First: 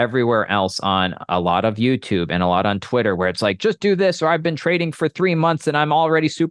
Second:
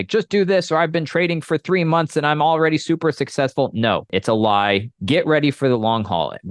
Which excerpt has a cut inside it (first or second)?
second